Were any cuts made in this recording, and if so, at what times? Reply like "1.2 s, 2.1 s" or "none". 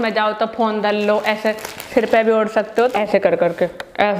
2.9 s

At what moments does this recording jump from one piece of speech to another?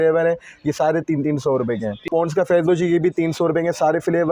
2.1 s

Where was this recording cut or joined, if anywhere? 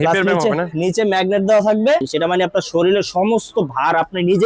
2.1 s

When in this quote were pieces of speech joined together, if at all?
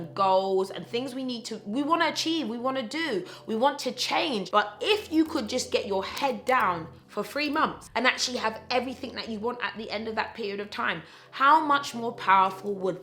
4.4 s, 7.8 s

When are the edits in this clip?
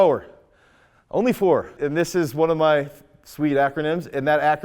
1.7 s

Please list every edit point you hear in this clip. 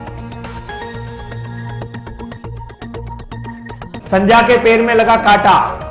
3.9 s

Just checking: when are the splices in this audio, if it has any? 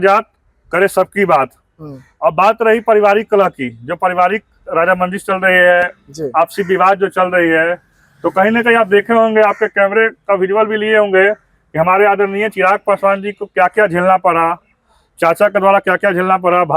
none

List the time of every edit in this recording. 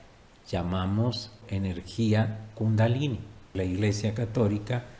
1.5 s, 3.5 s

